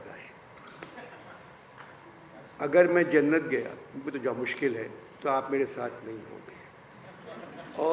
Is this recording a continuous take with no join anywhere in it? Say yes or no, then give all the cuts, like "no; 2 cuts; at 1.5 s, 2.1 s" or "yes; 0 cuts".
yes; 0 cuts